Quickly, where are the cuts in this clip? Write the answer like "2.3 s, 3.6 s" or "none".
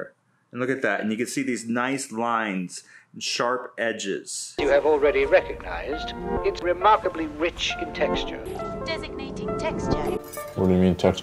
4.4 s